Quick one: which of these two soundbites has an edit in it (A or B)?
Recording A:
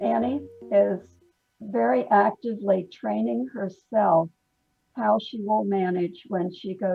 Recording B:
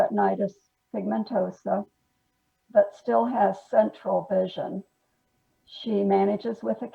A